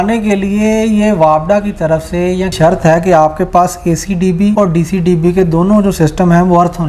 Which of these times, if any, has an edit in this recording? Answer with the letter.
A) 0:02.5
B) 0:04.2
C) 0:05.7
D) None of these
A